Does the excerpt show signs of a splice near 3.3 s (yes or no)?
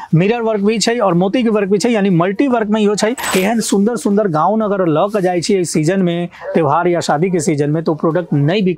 yes